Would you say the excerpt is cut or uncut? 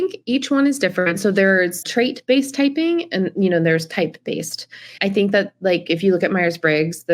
cut